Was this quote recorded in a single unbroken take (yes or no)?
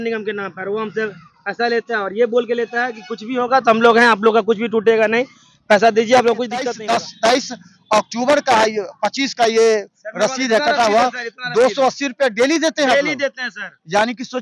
no